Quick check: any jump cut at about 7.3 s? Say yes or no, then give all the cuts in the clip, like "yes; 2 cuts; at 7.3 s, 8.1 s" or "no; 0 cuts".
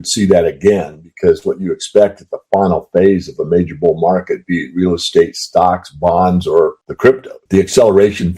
yes; 1 cut; at 7.3 s